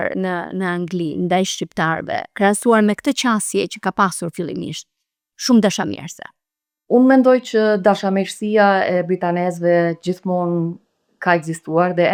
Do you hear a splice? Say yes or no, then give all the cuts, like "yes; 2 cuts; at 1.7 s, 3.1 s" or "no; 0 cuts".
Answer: no; 0 cuts